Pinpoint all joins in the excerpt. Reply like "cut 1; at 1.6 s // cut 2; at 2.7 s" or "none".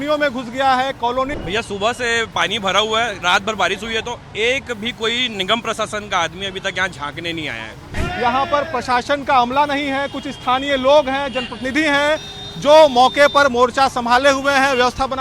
cut 1; at 1.4 s // cut 2; at 8.0 s